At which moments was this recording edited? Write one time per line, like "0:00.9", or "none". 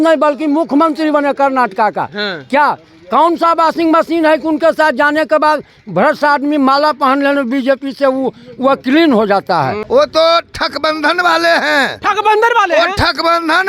0:09.8